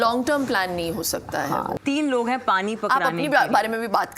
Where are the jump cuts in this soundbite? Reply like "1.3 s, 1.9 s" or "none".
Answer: 1.7 s